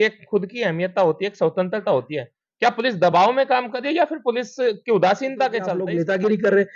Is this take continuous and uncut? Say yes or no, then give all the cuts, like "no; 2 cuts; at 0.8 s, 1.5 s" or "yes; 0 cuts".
no; 1 cut; at 5.8 s